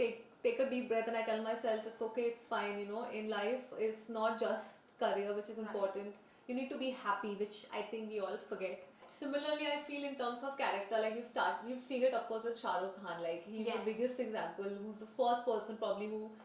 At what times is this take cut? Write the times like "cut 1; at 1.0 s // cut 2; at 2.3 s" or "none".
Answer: cut 1; at 9.1 s